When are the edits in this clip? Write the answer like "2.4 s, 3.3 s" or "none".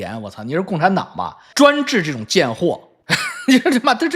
none